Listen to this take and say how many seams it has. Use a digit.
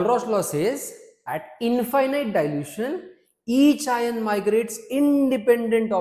0